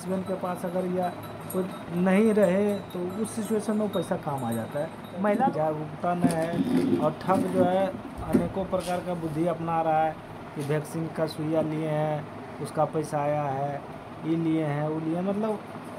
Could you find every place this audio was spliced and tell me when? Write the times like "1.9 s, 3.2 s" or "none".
5.5 s